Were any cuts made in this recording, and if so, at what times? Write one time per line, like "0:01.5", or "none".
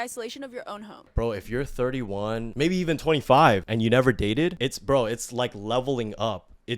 0:01.1
0:02.5
0:03.7
0:04.6